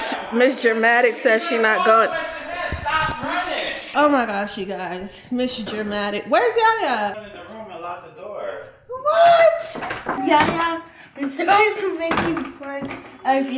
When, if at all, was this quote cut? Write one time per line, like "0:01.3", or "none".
0:10.0